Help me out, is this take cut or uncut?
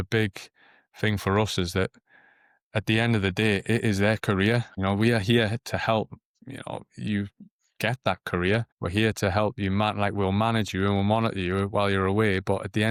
uncut